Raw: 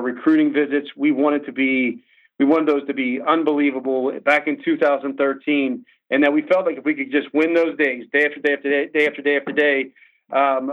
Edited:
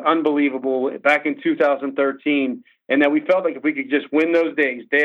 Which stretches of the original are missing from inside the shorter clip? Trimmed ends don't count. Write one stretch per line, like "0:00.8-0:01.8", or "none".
none